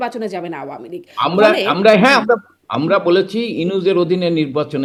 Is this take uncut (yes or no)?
yes